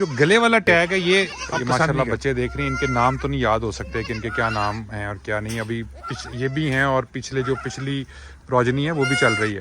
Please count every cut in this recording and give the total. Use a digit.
1